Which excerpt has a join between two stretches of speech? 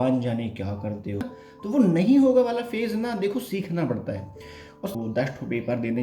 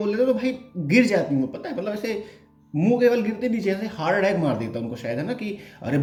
first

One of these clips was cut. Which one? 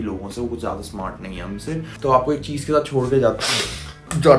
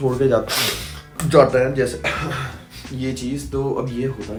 first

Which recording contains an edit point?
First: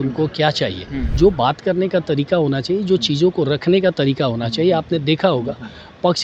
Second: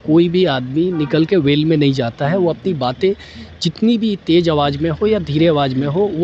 first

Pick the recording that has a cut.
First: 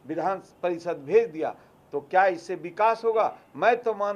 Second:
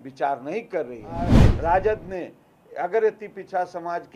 second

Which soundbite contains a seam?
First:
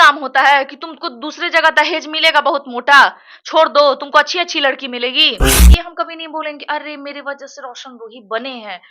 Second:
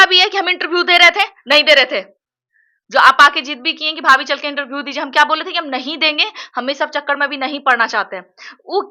first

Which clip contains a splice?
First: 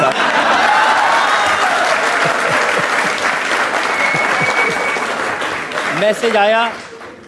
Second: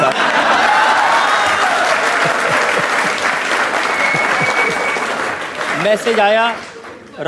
second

